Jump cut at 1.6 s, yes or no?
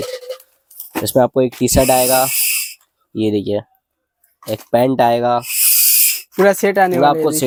no